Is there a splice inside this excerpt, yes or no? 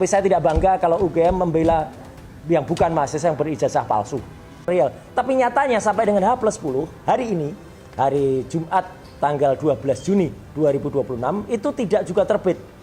yes